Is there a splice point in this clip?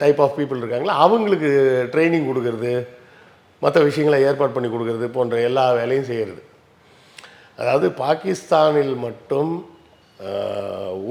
no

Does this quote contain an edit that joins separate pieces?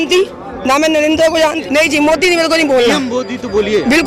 yes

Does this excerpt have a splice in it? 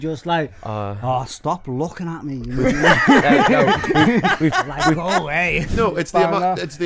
yes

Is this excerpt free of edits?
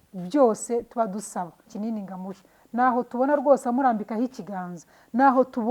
no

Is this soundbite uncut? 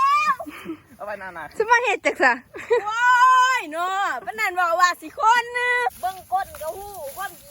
no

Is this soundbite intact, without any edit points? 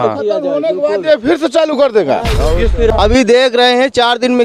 no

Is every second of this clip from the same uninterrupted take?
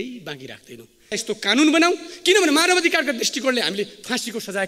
no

